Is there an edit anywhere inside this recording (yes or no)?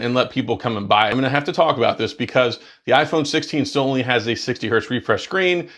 yes